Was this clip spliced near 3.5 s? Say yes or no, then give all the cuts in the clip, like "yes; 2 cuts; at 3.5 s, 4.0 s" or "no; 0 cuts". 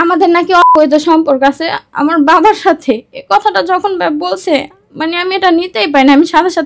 no; 1 cut; at 4.8 s